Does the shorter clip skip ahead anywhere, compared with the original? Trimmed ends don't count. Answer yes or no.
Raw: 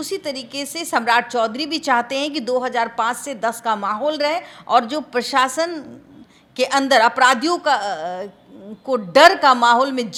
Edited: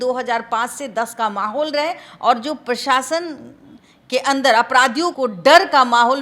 yes